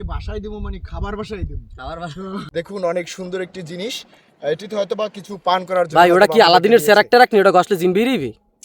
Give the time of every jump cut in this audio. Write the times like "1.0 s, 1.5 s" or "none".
2.5 s